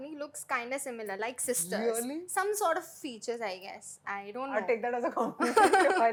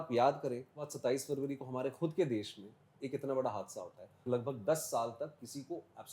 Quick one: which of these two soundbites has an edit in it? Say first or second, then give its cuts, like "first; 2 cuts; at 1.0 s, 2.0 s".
second; 2 cuts; at 0.9 s, 4.2 s